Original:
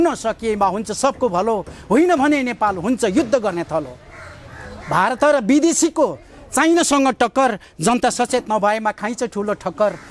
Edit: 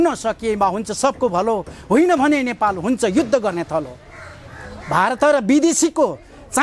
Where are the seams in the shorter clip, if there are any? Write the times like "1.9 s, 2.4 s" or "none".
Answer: none